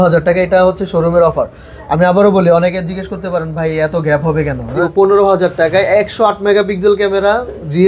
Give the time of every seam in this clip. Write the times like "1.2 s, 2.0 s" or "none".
4.7 s